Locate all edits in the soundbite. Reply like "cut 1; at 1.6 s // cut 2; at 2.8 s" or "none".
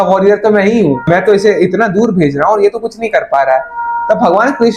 none